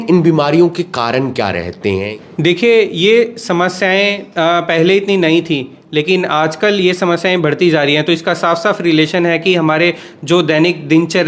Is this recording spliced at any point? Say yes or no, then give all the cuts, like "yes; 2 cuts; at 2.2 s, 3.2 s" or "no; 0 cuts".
yes; 1 cut; at 2.1 s